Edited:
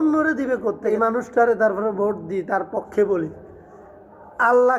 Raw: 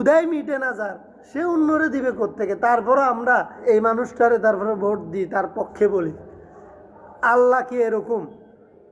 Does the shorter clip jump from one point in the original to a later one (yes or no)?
yes